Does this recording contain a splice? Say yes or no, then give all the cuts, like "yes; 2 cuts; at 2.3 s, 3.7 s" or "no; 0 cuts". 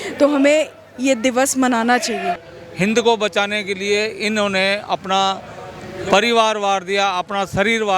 yes; 1 cut; at 2.5 s